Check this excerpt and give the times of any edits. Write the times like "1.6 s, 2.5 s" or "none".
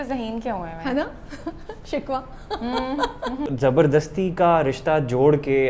3.4 s